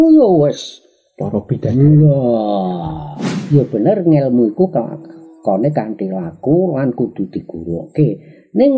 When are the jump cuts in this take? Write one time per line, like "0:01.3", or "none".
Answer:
0:03.4